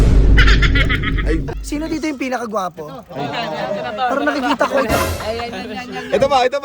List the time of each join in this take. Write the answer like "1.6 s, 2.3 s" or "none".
1.2 s